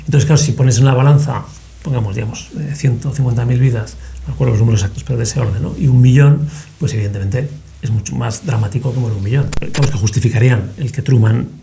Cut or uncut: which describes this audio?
cut